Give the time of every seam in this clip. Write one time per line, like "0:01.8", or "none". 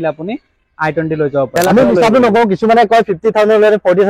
0:01.5